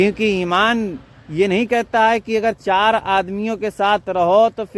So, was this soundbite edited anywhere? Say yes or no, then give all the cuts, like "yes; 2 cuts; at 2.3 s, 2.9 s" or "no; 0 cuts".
no; 0 cuts